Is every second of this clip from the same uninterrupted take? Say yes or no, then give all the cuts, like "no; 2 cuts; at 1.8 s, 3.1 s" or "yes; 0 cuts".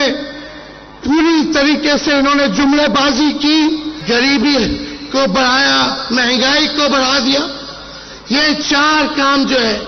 no; 1 cut; at 3.9 s